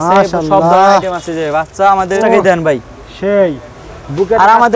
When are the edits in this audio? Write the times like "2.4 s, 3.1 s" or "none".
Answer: 2.2 s